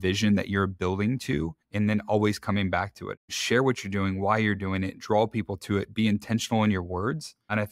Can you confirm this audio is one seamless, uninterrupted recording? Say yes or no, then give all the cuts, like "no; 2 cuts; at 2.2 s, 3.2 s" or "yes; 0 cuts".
no; 2 cuts; at 1.6 s, 3.2 s